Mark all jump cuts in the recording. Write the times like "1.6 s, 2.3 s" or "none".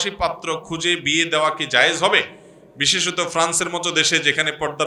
none